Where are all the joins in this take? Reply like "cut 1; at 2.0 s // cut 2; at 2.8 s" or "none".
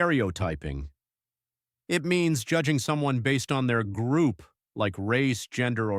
cut 1; at 2.4 s